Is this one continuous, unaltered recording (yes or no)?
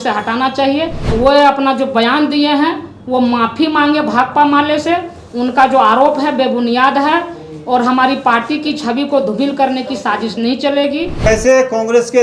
no